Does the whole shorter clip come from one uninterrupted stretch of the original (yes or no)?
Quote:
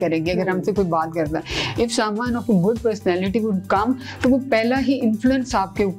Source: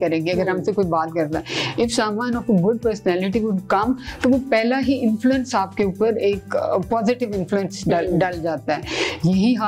yes